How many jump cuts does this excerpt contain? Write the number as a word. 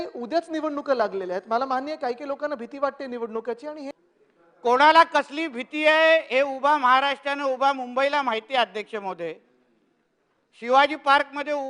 one